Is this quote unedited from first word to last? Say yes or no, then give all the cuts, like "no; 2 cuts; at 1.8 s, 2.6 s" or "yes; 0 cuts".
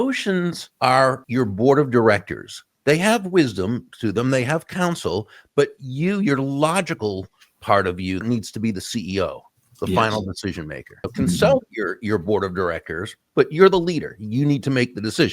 no; 3 cuts; at 1.0 s, 8.2 s, 11.1 s